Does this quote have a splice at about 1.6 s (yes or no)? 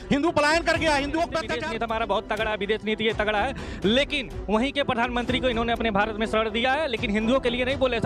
yes